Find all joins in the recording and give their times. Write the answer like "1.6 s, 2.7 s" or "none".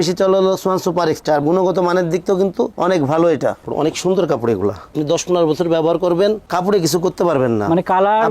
3.6 s